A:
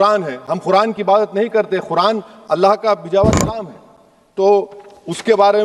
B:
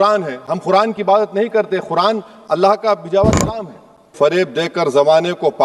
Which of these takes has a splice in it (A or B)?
B